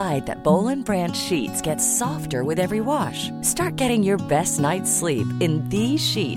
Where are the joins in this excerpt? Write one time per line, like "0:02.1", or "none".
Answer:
none